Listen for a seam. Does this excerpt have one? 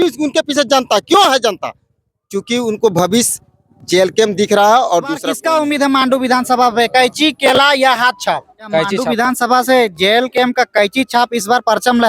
yes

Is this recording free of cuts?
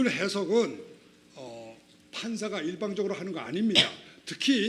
yes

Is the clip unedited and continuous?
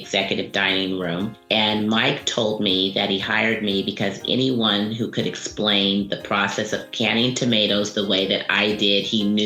yes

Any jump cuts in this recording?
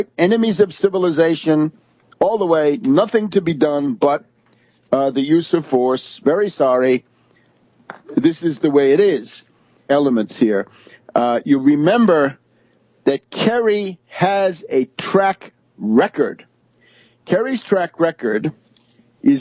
no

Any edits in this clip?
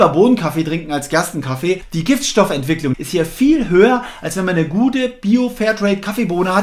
yes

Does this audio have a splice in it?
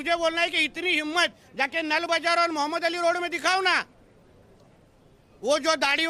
no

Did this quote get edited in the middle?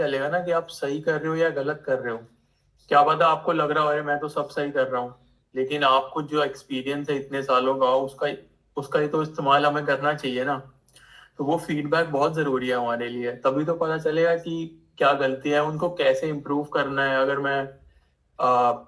no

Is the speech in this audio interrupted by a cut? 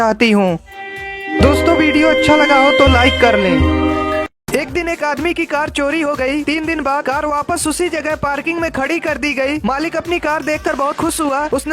yes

